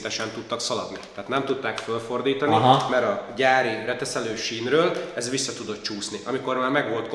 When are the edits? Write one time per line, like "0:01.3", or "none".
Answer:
none